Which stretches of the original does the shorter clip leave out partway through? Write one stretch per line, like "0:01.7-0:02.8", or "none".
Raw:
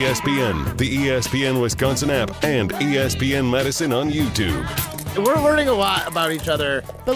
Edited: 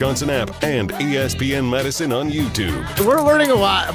0:04.7-0:05.0